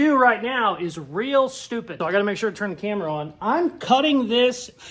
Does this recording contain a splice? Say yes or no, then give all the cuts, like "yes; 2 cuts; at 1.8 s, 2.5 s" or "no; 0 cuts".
no; 0 cuts